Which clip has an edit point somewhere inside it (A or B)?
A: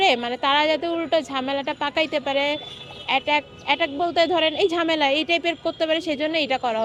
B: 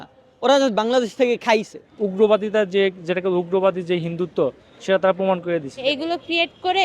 B